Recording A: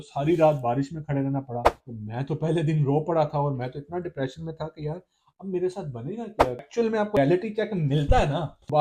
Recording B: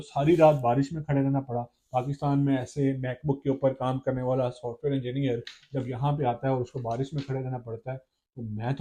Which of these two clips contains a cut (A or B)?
A